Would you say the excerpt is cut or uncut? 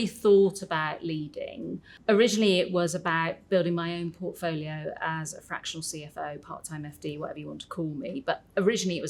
cut